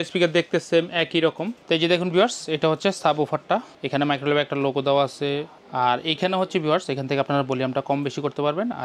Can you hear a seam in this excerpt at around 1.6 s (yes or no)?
yes